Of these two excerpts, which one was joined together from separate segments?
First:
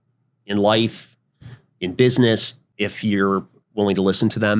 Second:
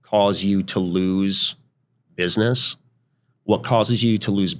first; 1 cut; at 2.6 s

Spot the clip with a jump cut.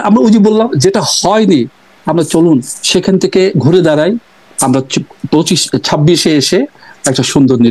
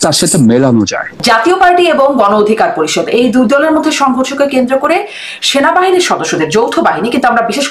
second; 1 cut; at 1.1 s

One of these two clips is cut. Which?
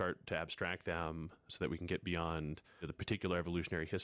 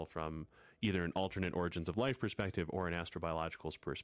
first; 1 cut; at 1.5 s

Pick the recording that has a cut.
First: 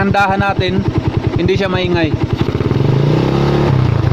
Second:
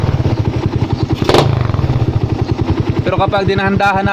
second; 2 cuts; at 0.8 s, 2.8 s

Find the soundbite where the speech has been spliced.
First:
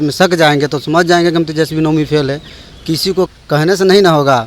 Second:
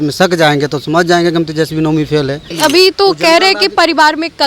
second; 1 cut; at 2.5 s

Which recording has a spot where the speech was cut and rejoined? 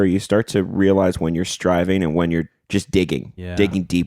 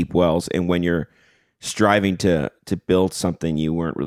first; 1 cut; at 2.6 s

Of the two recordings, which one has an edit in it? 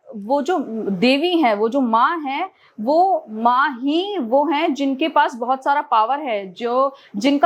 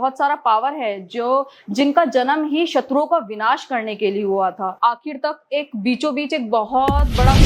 second; 1 cut; at 4.7 s

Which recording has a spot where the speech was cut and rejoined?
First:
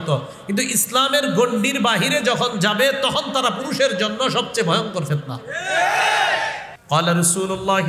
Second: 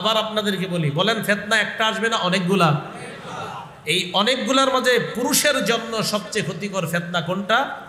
first; 1 cut; at 6.7 s

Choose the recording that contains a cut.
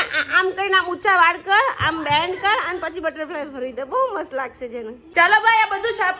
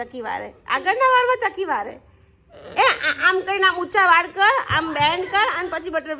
first; 1 cut; at 5.0 s

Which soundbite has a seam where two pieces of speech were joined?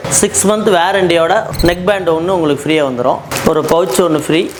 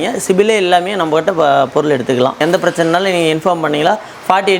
second; 1 cut; at 2.4 s

